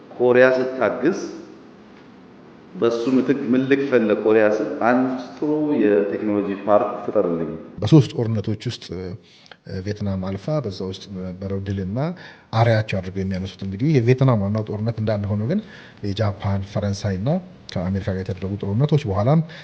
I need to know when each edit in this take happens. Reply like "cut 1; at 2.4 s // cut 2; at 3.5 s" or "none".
cut 1; at 7.7 s